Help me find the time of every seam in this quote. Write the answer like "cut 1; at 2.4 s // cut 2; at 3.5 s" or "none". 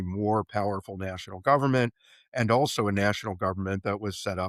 none

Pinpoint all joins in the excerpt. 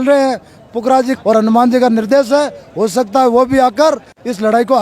cut 1; at 1.1 s

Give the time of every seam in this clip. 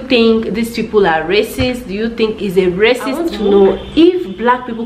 cut 1; at 3.3 s

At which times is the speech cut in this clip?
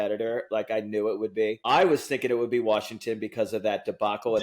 cut 1; at 1.6 s

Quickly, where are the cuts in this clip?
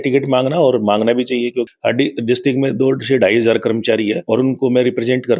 cut 1; at 1.7 s // cut 2; at 4.2 s

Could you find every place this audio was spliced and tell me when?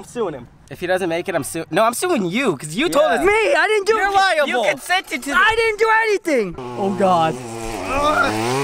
cut 1; at 6.6 s

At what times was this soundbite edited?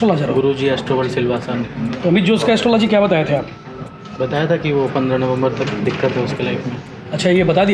none

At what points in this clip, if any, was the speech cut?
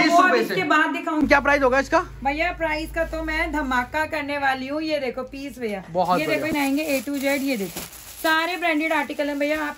cut 1; at 1.2 s // cut 2; at 6.5 s

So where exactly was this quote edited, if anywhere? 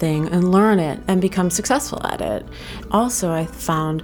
cut 1; at 1.0 s // cut 2; at 2.7 s

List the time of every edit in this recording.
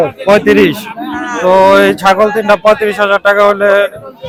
none

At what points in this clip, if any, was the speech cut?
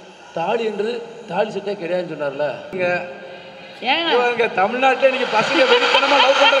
cut 1; at 2.8 s

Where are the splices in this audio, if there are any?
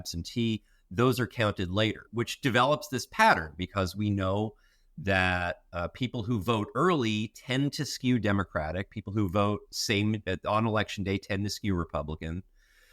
cut 1; at 2.1 s

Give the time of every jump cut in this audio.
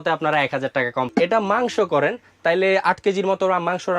cut 1; at 1.1 s

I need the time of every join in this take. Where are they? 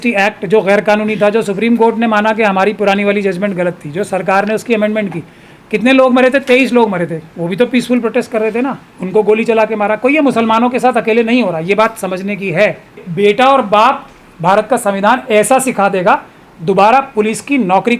cut 1; at 7.3 s // cut 2; at 13.0 s

